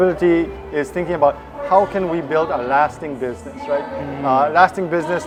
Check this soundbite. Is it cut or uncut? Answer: uncut